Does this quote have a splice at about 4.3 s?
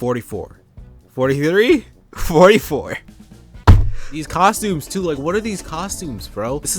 yes; 1 cut; at 4.3 s

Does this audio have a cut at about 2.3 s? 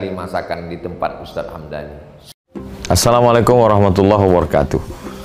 yes; 1 cut; at 2.3 s

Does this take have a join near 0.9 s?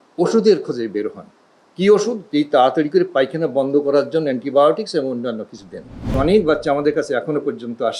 no; 1 cut; at 6.1 s

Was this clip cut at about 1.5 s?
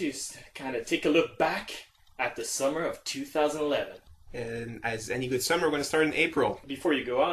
no; 1 cut; at 3.4 s

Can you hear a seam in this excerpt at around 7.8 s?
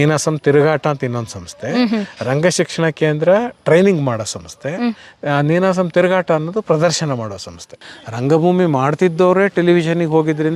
yes; 1 cut; at 7.8 s

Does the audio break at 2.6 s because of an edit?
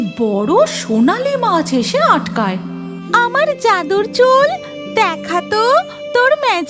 yes; 1 cut; at 2.6 s

